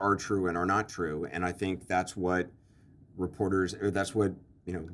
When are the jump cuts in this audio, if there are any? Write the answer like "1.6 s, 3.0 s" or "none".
none